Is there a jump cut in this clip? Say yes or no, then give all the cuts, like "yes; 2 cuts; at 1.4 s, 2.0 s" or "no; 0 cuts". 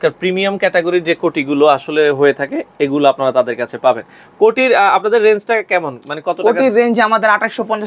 no; 0 cuts